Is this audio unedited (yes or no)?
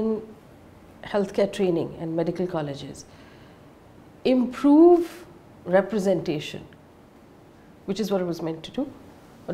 yes